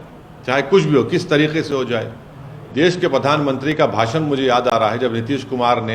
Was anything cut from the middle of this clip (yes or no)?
no